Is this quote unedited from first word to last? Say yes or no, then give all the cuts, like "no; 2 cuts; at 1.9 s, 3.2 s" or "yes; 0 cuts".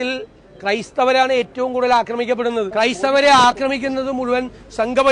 no; 1 cut; at 2.7 s